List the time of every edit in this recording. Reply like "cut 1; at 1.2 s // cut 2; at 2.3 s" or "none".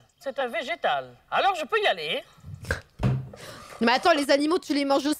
cut 1; at 1.2 s